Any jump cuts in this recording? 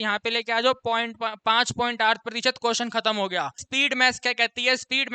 yes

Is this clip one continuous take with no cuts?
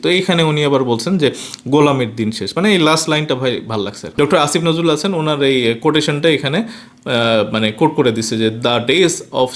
no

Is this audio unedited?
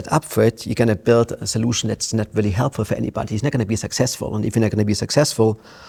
yes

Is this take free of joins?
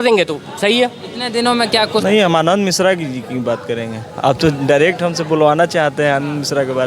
no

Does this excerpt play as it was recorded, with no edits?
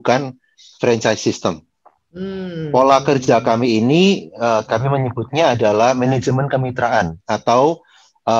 yes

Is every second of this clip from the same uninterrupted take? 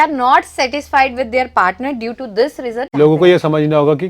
no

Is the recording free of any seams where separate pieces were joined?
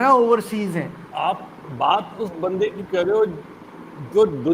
no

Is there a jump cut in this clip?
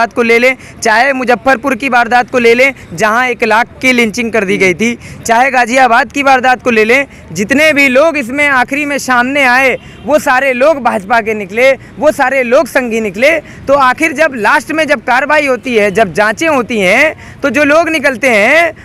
no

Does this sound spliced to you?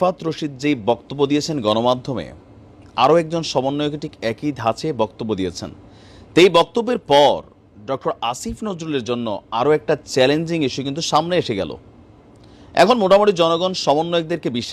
no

